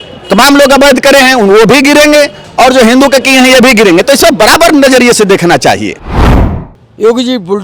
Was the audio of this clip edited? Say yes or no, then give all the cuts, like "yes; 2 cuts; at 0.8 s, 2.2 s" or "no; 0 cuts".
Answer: yes; 1 cut; at 6.3 s